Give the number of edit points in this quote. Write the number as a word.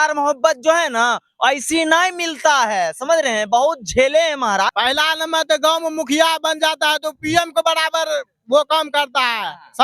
one